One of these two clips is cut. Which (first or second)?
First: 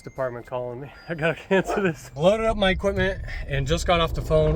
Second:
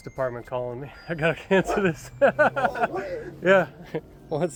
first